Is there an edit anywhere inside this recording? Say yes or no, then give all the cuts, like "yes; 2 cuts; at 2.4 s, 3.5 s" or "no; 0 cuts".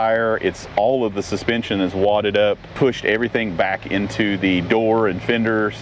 yes; 1 cut; at 2.7 s